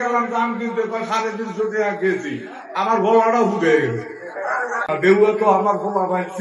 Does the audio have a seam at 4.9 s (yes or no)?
yes